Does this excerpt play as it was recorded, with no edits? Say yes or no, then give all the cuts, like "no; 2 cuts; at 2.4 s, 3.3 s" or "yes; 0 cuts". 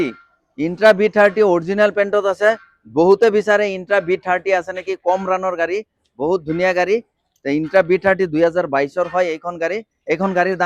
yes; 0 cuts